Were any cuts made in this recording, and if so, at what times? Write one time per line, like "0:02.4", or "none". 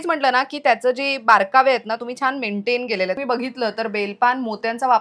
0:03.2